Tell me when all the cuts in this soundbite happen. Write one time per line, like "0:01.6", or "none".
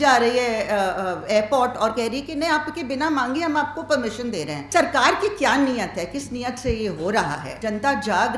0:04.7
0:07.5